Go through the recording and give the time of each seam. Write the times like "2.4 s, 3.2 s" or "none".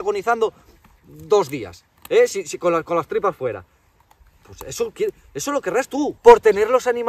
6.2 s